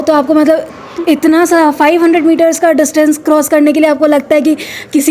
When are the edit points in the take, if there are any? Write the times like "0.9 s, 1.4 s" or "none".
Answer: none